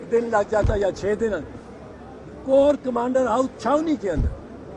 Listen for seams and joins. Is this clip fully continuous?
yes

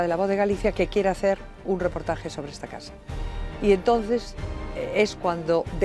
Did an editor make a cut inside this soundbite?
no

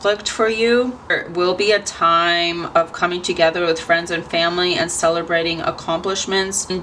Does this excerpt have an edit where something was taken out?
no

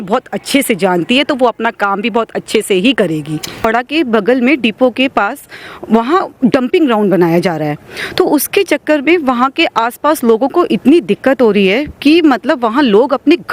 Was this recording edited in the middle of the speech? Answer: yes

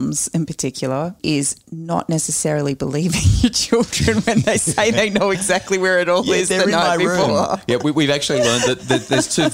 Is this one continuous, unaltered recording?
no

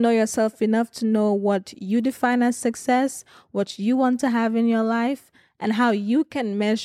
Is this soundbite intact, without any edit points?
yes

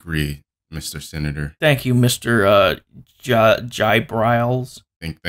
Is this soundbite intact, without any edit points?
yes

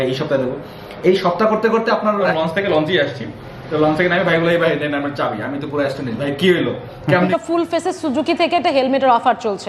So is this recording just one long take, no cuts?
no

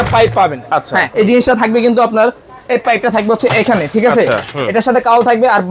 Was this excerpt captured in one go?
no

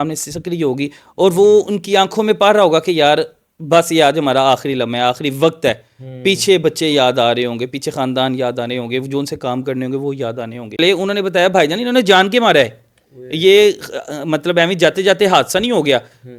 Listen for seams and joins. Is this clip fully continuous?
no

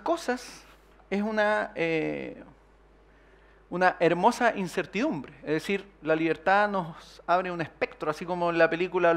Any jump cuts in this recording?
yes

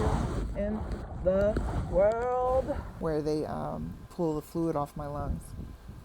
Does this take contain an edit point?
yes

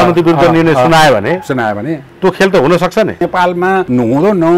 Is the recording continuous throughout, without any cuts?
no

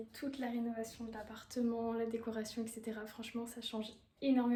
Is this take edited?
no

